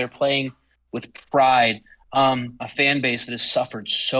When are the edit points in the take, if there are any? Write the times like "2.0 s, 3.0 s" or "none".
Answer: 2.6 s